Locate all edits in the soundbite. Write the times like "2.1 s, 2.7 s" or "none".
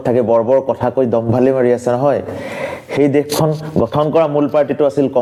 none